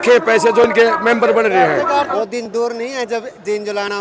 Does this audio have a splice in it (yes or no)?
yes